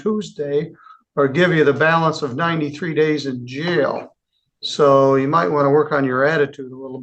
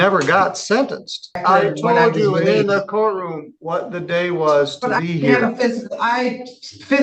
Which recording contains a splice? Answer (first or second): second